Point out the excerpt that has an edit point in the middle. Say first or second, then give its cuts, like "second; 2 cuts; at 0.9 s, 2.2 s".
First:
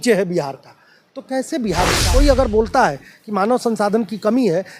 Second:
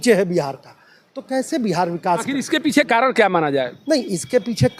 first; 1 cut; at 2.0 s